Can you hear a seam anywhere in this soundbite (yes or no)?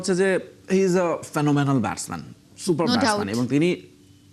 no